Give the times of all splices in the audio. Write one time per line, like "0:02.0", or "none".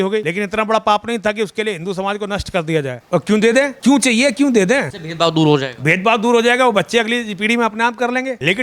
0:03.0